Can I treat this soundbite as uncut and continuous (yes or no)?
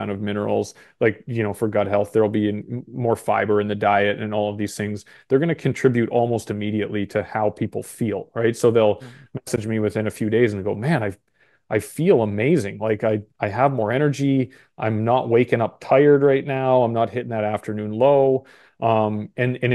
yes